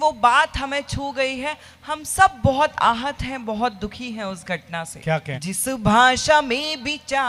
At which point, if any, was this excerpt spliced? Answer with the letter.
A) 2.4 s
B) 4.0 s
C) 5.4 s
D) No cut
C